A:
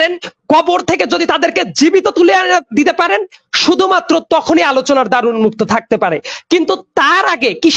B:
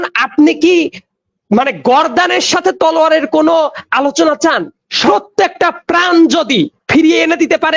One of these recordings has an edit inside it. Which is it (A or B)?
B